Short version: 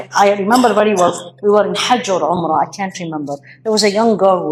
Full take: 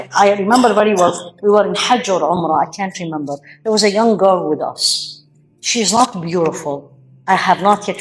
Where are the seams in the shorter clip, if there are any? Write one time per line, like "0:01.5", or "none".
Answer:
none